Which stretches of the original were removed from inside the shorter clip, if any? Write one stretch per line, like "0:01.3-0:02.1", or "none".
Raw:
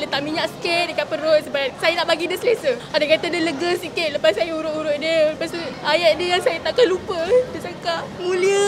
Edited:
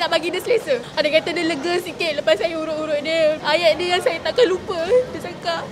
0:05.4-0:05.8